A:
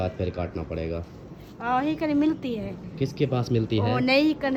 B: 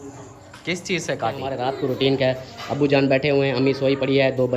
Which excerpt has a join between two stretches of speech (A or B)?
B